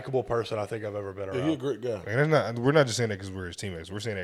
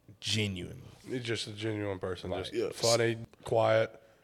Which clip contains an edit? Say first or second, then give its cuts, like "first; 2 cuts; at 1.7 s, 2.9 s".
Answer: second; 1 cut; at 3.2 s